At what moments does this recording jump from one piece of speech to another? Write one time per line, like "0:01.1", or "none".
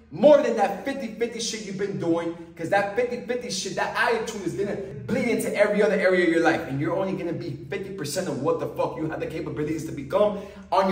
0:04.9

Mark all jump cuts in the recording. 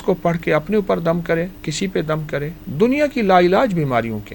0:01.6
0:02.6

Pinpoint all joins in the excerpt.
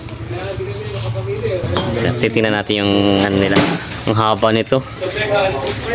0:01.9

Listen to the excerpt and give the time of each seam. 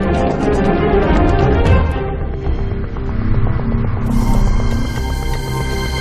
none

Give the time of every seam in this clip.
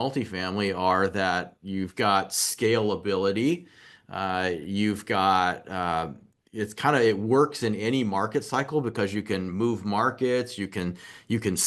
none

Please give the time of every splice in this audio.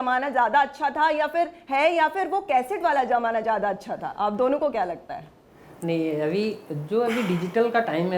none

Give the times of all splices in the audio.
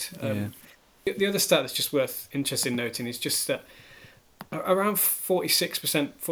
0:01.1

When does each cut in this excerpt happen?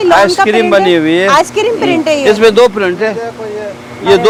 none

